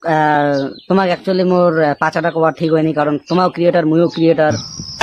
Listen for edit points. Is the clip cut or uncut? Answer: uncut